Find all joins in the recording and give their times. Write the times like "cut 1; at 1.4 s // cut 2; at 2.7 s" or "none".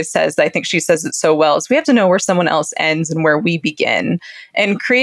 none